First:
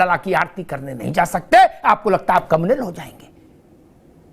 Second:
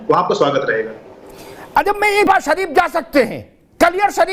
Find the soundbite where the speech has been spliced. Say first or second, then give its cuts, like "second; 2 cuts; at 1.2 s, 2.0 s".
second; 1 cut; at 2.3 s